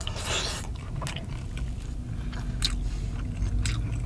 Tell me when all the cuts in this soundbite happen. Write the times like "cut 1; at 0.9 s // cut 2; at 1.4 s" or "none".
none